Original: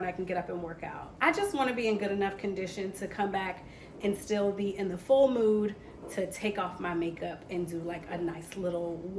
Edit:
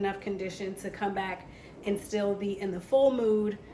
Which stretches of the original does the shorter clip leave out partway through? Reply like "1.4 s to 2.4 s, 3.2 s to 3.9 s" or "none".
none